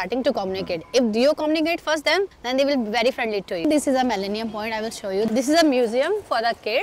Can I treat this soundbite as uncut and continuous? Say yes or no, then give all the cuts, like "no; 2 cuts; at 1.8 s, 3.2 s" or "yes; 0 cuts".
no; 2 cuts; at 3.6 s, 5.3 s